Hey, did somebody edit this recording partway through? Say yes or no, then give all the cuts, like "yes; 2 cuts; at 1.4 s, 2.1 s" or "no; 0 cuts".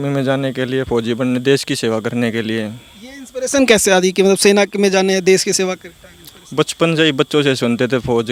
no; 0 cuts